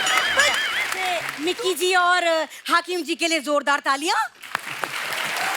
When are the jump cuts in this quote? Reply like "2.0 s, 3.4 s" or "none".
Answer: 1.0 s